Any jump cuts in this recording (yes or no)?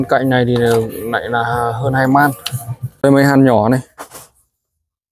yes